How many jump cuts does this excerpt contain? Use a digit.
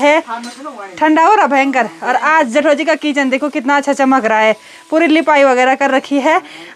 0